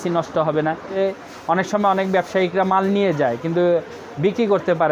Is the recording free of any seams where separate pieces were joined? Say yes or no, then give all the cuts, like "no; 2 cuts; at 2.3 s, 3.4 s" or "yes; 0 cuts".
no; 1 cut; at 1.0 s